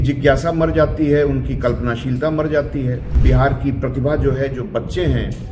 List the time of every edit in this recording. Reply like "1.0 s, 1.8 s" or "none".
3.1 s